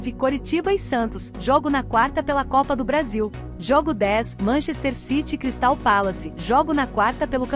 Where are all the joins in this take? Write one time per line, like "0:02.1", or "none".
0:03.5